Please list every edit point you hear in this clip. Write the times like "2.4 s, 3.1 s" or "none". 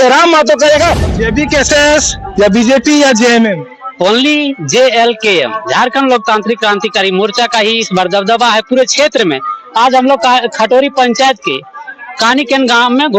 1.0 s